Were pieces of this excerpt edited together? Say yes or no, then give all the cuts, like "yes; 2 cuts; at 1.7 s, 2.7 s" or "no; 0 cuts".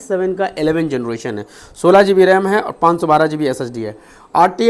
no; 0 cuts